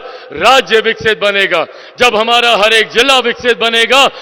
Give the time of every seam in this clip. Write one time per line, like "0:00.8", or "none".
none